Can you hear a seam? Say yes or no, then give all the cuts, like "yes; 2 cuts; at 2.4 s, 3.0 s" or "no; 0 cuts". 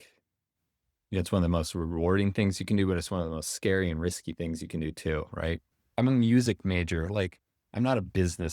yes; 1 cut; at 5.8 s